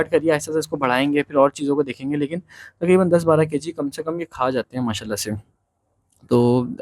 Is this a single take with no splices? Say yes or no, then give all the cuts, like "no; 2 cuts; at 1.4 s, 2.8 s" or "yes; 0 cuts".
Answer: yes; 0 cuts